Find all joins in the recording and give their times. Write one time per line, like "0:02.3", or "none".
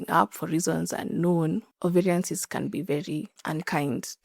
0:01.7
0:03.4